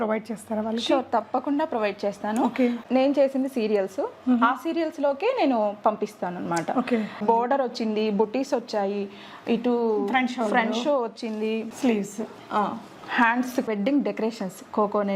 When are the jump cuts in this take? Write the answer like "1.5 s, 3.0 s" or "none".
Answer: 2.8 s, 7.2 s, 11.7 s, 13.7 s